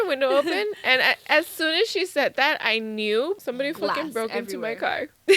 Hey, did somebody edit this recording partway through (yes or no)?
yes